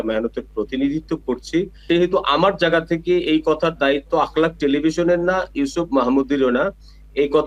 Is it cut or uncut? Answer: uncut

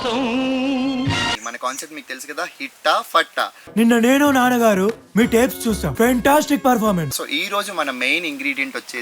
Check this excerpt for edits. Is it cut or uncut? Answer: cut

